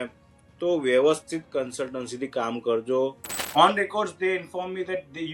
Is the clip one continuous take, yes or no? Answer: no